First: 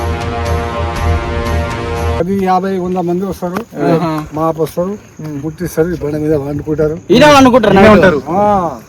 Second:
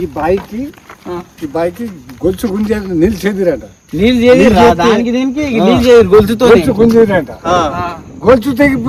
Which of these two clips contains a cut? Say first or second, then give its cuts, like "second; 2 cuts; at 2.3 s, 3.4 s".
first; 1 cut; at 2.2 s